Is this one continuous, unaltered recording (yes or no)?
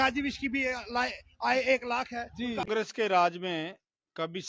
no